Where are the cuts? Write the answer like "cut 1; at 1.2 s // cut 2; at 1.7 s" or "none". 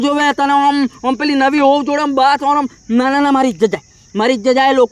none

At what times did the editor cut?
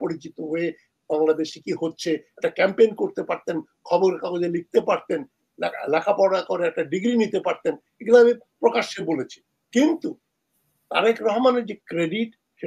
none

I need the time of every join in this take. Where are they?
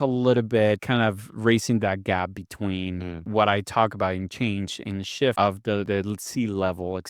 cut 1; at 0.8 s // cut 2; at 3.3 s // cut 3; at 5.7 s

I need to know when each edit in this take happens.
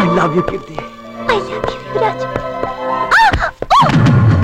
none

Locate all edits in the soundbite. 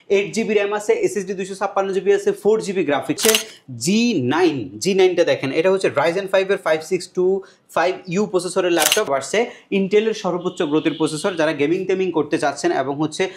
cut 1; at 3.2 s // cut 2; at 9.1 s

